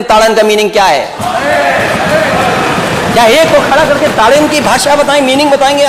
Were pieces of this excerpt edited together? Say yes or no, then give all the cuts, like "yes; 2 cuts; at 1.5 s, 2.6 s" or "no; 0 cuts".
no; 0 cuts